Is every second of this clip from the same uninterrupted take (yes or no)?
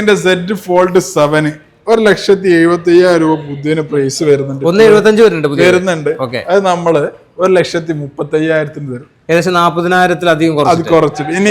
yes